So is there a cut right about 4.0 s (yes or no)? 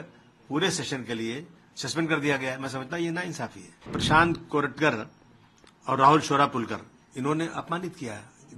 yes